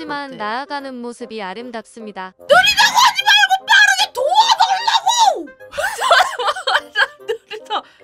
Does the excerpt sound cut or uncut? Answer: uncut